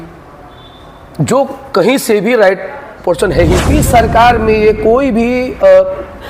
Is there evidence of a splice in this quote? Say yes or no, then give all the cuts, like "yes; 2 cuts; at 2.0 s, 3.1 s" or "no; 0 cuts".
yes; 1 cut; at 3.7 s